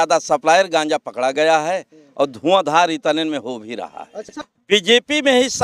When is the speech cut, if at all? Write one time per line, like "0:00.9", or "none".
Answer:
0:04.3